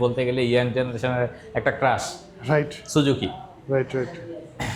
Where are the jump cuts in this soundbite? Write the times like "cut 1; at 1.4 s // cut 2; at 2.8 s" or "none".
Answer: none